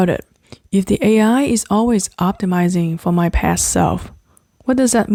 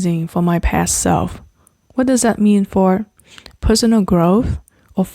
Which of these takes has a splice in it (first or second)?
second